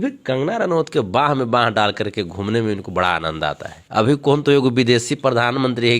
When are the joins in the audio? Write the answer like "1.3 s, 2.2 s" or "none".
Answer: 3.7 s